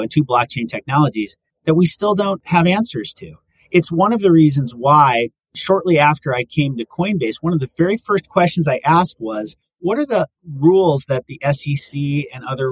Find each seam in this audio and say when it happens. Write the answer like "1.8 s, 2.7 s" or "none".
2.4 s